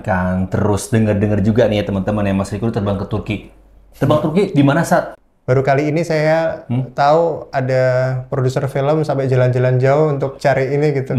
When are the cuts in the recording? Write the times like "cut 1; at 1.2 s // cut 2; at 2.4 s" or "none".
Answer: cut 1; at 5.2 s